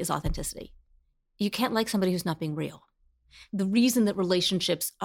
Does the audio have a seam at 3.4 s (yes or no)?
yes